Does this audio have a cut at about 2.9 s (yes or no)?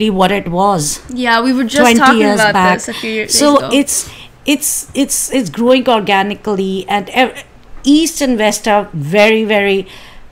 no